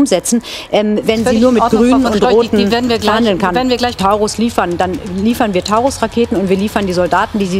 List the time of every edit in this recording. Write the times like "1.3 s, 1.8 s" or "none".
4.0 s

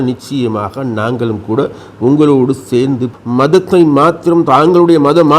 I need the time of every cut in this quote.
3.1 s

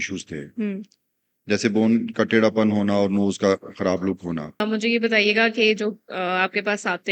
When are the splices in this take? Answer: 4.6 s

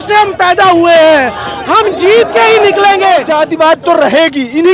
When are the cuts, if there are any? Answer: 3.2 s

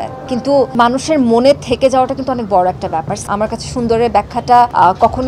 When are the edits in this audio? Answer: 3.1 s

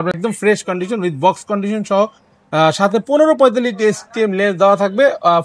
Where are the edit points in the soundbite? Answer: none

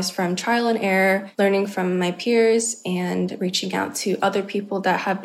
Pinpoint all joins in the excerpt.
1.3 s

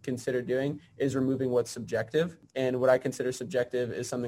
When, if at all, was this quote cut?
2.4 s

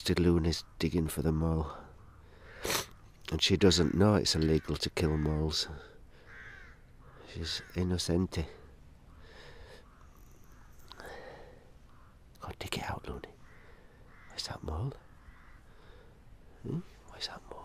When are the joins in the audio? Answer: 6.7 s

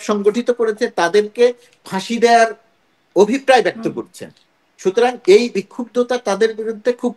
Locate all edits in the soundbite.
none

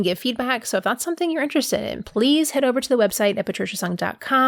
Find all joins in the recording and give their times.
none

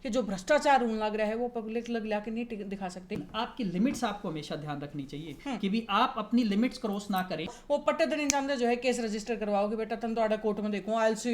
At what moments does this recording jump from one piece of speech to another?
3.3 s, 7.6 s

